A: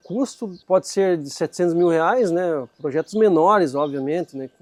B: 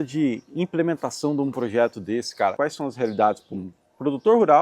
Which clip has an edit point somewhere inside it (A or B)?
B